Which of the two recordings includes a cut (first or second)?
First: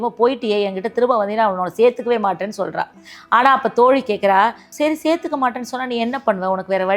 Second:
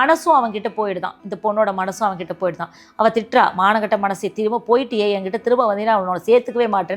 first